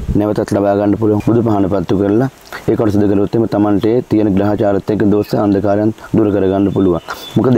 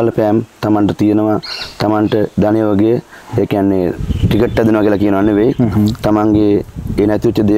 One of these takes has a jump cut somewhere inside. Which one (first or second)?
first